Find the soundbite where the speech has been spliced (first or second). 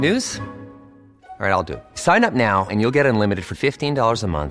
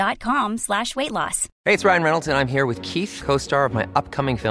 second